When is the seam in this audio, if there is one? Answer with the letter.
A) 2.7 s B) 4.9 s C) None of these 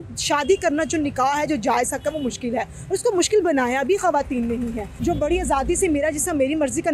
B